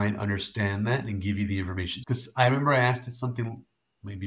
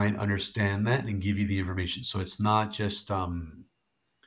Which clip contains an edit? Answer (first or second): first